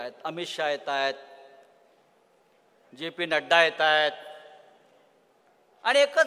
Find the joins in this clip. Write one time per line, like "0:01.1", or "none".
none

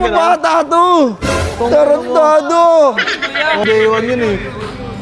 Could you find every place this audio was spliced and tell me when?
0:03.6

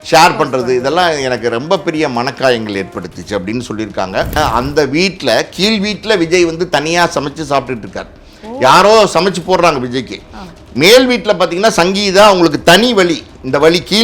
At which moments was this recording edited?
0:04.3

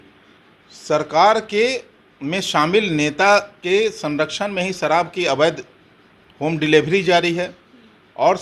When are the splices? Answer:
none

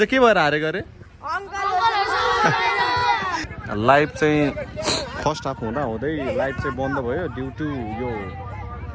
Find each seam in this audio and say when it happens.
0:03.5

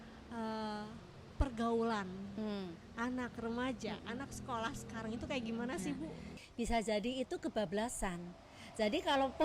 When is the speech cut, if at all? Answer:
0:06.4

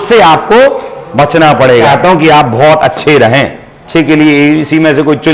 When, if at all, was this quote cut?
0:01.9
0:03.7

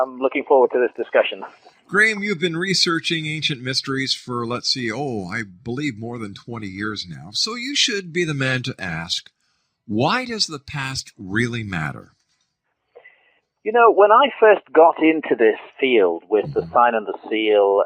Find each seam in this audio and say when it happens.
0:06.2

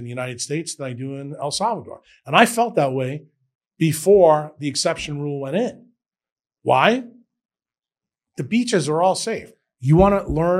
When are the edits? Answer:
0:09.4

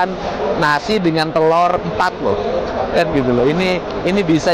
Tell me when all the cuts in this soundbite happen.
none

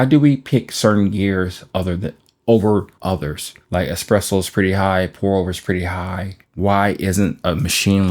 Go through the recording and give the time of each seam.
0:06.3

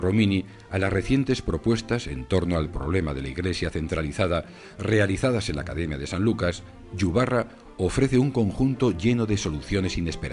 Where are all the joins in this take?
0:04.0

